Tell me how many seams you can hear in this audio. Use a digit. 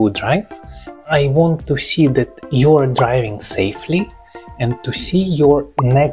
1